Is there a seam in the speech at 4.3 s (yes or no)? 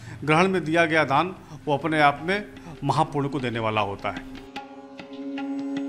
yes